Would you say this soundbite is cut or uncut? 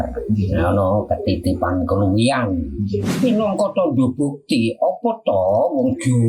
cut